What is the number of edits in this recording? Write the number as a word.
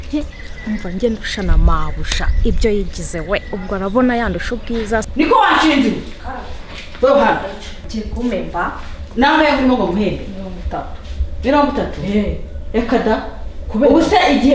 two